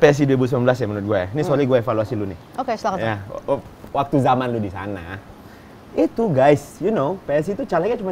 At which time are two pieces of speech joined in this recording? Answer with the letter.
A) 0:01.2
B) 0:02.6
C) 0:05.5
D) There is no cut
D